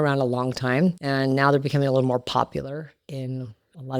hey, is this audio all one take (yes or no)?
no